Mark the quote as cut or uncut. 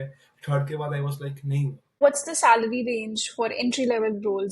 cut